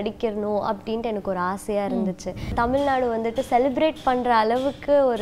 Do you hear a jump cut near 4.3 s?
no; 1 cut; at 2.5 s

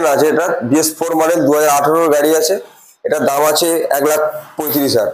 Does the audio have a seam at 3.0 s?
no; 0 cuts

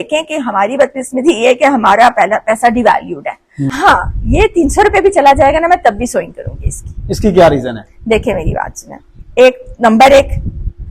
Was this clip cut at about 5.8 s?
no; 1 cut; at 3.6 s

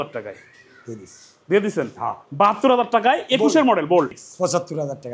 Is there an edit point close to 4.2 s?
yes; 1 cut; at 4.2 s

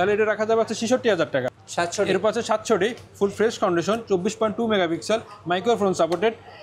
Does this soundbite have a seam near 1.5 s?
yes; 1 cut; at 1.5 s

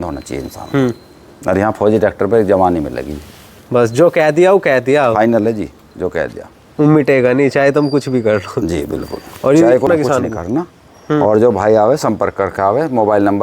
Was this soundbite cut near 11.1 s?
no; 1 cut; at 9.9 s

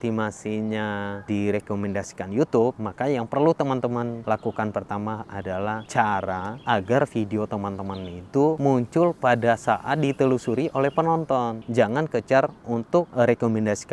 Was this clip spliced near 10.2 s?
no; 8 cuts; at 1.3 s, 2.8 s, 4.2 s, 5.6 s, 6.5 s, 8.6 s, 11.6 s, 13.1 s

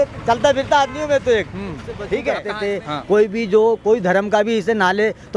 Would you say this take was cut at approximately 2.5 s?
yes; 1 cut; at 2.5 s

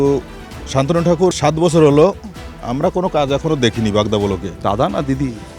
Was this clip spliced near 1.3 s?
yes; 2 cuts; at 1.3 s, 4.5 s

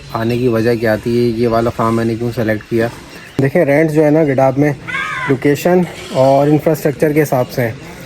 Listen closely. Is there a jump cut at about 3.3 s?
yes; 1 cut; at 3.3 s

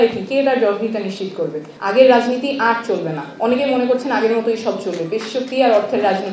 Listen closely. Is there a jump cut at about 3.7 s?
no; 1 cut; at 1.7 s

